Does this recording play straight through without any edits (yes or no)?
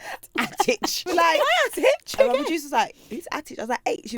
no